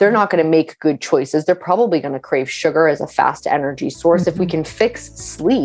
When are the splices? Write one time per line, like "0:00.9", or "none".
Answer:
none